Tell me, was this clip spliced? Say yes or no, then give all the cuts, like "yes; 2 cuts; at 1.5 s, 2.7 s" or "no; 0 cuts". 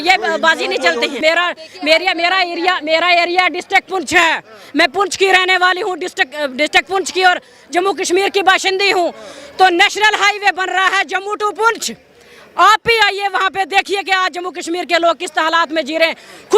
yes; 1 cut; at 1.2 s